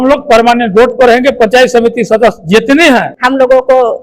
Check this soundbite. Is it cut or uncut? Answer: cut